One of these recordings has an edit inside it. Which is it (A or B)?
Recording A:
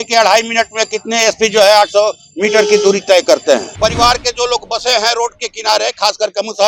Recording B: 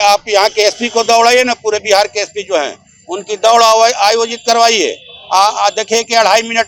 A